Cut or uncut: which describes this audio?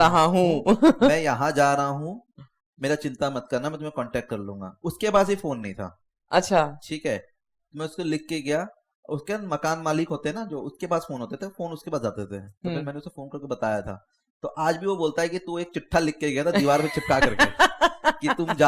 uncut